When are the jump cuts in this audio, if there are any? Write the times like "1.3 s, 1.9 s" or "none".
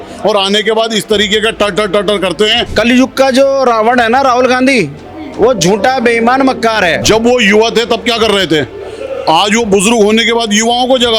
2.6 s, 7.0 s

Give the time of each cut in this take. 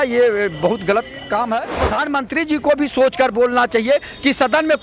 1.8 s

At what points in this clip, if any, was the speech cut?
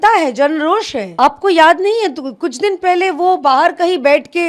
1.0 s

